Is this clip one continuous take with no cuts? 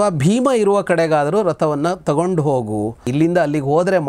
no; 1 cut; at 3.0 s

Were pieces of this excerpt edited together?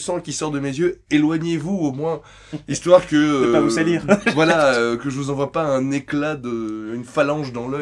no; 0 cuts

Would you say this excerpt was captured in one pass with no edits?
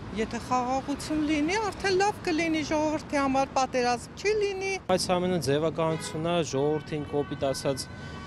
no; 1 cut; at 4.9 s

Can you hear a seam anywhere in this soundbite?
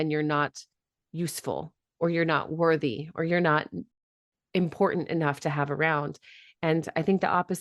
yes; 1 cut; at 3.8 s

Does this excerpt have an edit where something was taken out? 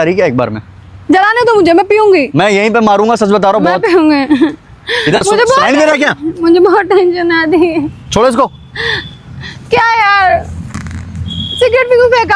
no; 0 cuts

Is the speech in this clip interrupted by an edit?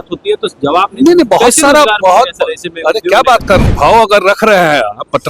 yes; 1 cut; at 3.7 s

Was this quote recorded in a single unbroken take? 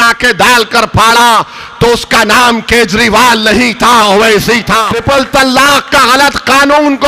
no; 1 cut; at 4.9 s

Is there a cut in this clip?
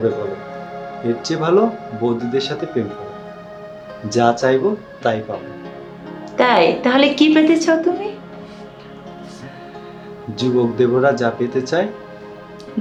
no; 0 cuts

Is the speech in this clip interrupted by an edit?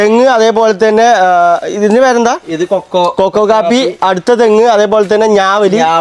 no; 0 cuts

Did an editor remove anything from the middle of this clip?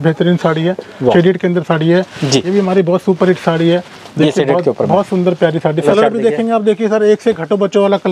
yes; 2 cuts; at 1.1 s, 5.9 s

